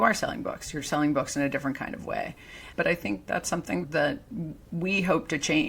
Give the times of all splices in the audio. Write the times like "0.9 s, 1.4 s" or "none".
3.8 s